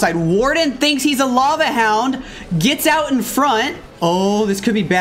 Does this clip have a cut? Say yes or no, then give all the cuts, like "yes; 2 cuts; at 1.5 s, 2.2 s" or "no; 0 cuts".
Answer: yes; 1 cut; at 3.8 s